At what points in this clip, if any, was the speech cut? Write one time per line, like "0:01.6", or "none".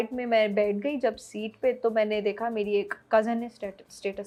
none

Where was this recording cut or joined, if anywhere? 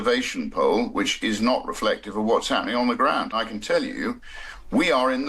0:03.4

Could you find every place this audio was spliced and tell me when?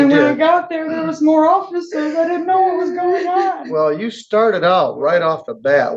0:03.6

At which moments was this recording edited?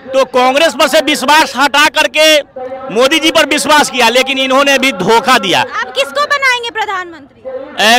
none

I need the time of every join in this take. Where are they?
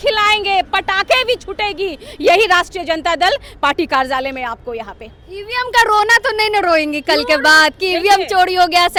none

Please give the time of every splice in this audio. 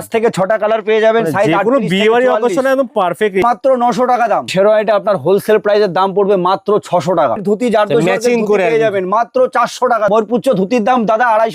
0:03.4
0:04.5
0:07.4
0:10.1

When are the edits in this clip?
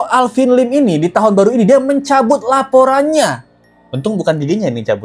none

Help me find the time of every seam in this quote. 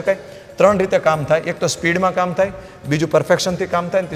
none

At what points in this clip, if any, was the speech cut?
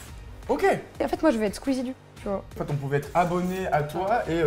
0:01.1
0:02.7

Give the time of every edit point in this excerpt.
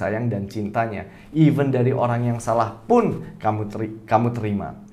none

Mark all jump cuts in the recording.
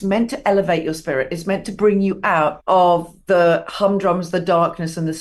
0:02.6

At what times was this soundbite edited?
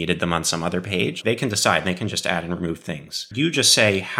0:01.2
0:03.3

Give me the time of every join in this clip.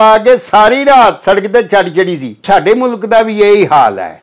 0:02.3

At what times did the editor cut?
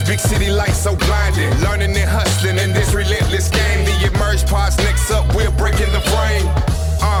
none

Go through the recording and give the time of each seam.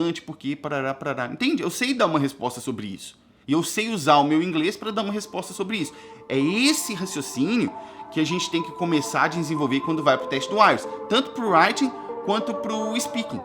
none

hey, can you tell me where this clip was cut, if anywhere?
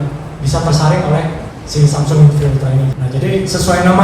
0:03.0

